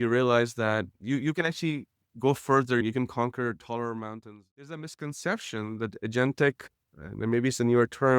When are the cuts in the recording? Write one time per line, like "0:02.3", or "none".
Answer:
0:01.0
0:04.2